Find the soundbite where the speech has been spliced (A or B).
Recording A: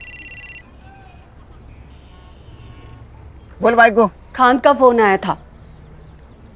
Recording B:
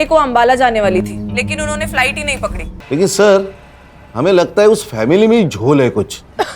B